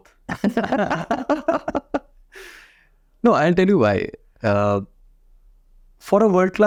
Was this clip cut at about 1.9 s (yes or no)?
no